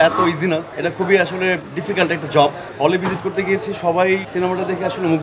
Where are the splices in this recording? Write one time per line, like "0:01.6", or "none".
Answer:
0:02.6
0:04.3

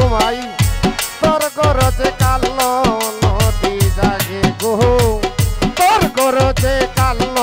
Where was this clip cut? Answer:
none

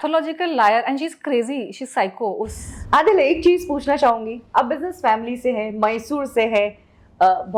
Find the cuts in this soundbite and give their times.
none

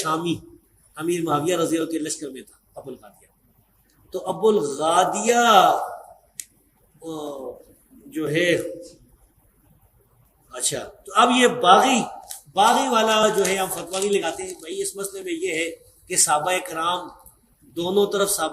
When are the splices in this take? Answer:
none

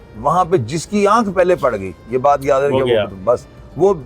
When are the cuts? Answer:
none

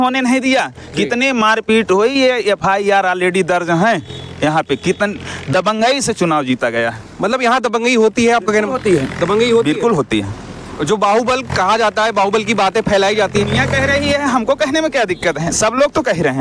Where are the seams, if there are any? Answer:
none

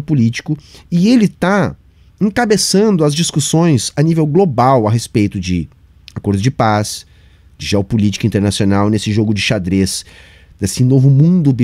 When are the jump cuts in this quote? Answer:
none

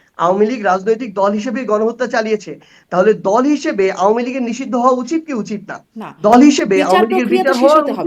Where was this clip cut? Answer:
none

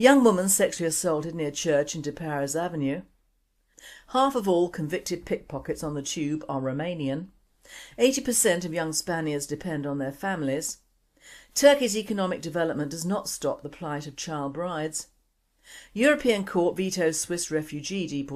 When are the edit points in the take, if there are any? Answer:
none

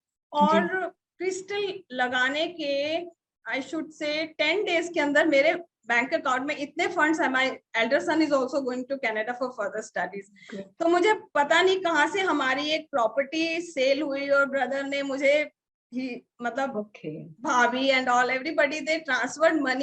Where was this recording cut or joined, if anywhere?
none

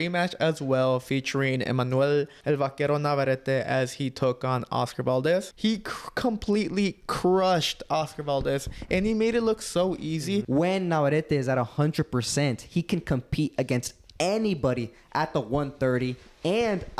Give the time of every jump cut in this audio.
0:02.4
0:05.5
0:10.5

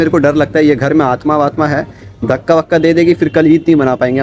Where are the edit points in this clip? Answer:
none

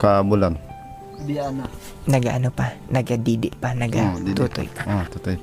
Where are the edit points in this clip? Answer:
none

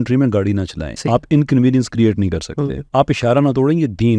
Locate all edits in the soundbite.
0:01.0
0:02.8

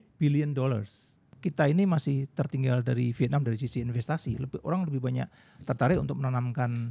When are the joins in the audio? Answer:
0:01.3

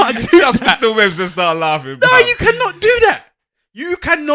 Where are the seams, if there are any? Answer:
none

